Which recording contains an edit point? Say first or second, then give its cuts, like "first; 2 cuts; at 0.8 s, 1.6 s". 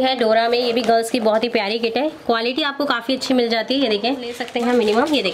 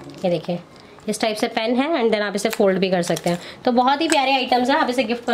first; 1 cut; at 4.4 s